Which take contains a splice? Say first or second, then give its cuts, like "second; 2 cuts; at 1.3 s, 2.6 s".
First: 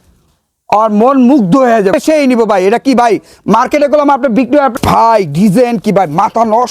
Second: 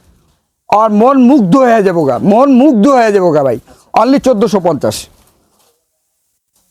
first; 2 cuts; at 1.9 s, 4.7 s